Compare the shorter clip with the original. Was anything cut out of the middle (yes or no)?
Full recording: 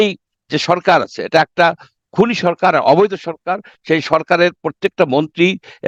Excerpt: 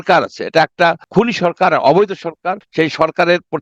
yes